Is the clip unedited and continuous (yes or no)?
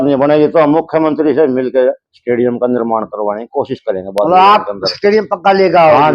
yes